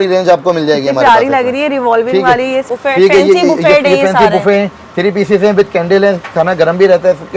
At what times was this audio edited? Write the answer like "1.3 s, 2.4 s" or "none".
2.6 s

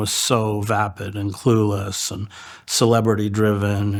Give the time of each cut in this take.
none

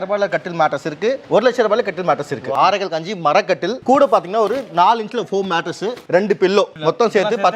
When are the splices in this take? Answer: 1.2 s, 2.5 s, 6.0 s, 6.7 s

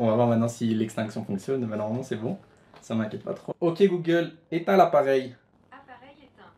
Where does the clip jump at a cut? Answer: 3.4 s, 5.5 s

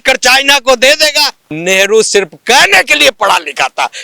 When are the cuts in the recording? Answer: 1.5 s

